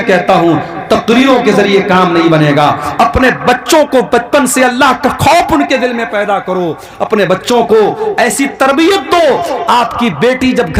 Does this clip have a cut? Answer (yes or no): no